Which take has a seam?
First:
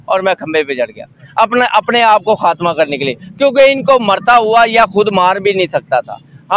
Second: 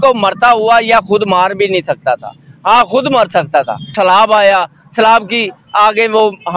second; 1 cut; at 3.9 s

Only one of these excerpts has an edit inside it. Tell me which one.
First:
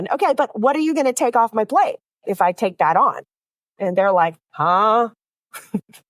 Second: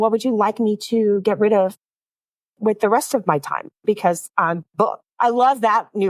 second; 1 cut; at 5.0 s

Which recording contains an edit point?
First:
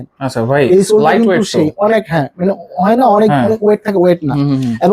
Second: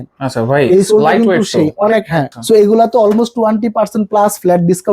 second; 1 cut; at 2.3 s

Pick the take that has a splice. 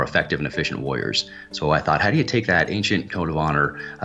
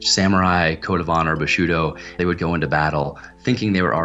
second; 1 cut; at 2.2 s

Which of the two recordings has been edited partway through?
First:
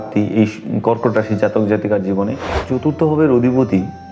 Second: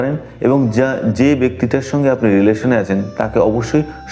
first; 1 cut; at 2.4 s

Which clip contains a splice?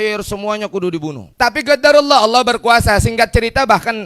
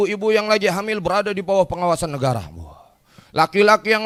first; 1 cut; at 1.2 s

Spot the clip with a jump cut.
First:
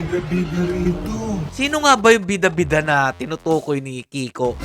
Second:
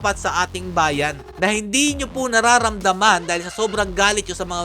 first; 1 cut; at 1.5 s

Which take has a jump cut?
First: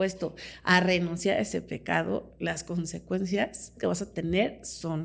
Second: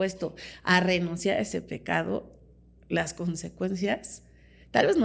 first; 2 cuts; at 2.3 s, 3.8 s

